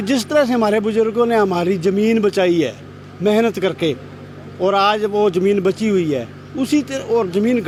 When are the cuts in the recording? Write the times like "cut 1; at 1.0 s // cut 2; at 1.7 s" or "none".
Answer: none